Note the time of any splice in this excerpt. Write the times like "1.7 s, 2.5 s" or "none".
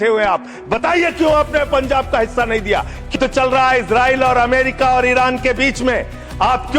3.1 s